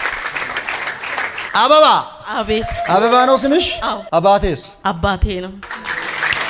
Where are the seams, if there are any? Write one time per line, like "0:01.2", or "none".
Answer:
0:01.4
0:04.0
0:05.7

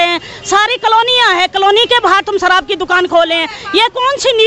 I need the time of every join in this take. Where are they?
none

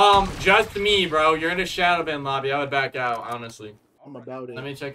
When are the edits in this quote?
0:03.9

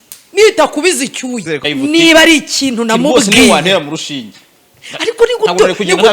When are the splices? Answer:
0:01.6

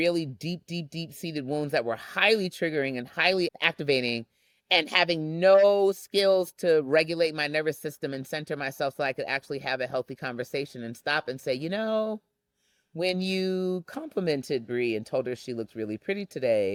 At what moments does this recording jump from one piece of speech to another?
none

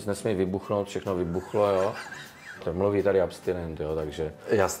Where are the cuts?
0:02.7

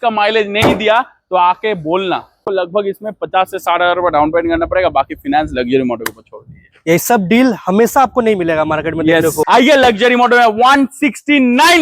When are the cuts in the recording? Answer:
0:02.4
0:09.5

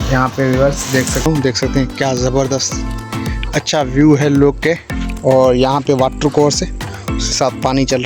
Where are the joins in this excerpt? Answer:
0:01.2

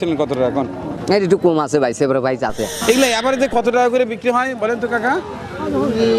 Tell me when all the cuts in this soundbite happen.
0:00.9
0:02.8

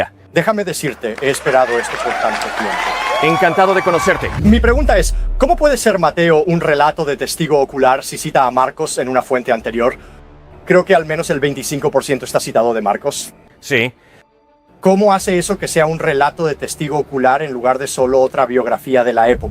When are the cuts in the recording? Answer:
0:04.3

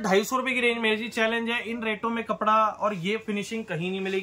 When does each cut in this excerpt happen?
none

